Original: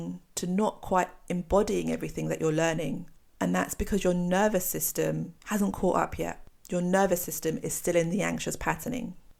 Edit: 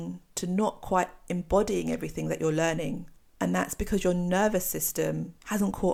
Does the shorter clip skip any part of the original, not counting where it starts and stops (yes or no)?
no